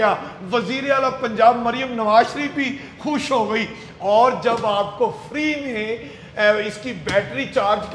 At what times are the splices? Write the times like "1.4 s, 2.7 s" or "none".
none